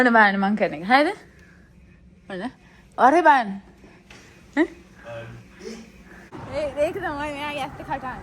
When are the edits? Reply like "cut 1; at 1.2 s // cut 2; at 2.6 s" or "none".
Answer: cut 1; at 6.3 s

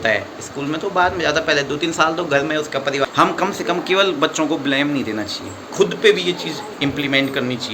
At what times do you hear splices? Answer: cut 1; at 3.1 s

